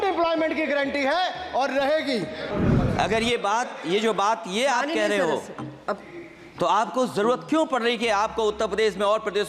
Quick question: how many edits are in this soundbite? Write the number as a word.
one